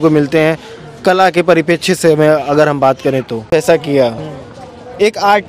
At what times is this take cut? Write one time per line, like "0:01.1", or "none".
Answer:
0:03.5